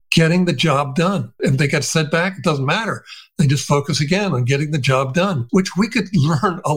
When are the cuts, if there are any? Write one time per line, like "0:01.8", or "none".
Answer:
0:01.4
0:05.4

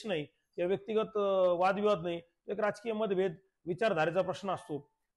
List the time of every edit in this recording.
none

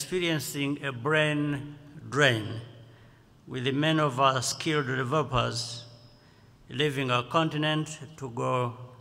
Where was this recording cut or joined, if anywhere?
none

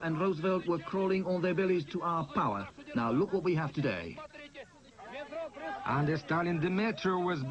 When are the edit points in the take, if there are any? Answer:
none

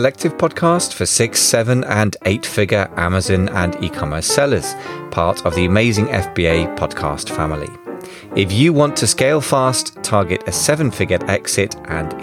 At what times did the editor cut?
none

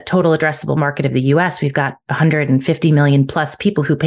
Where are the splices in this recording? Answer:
none

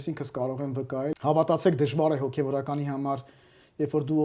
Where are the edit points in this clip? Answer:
0:01.1

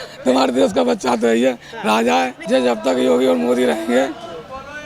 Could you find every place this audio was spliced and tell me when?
0:02.4

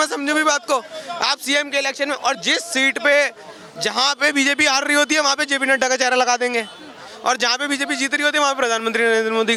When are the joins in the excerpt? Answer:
none

